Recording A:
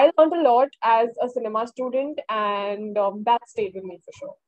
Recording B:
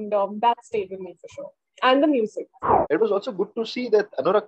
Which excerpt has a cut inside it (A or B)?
B